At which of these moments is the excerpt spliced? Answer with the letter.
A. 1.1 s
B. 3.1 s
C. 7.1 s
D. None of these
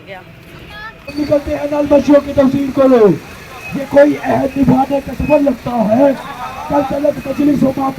A